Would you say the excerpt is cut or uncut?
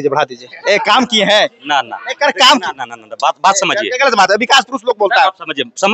uncut